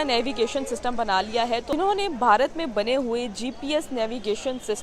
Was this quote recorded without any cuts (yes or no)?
no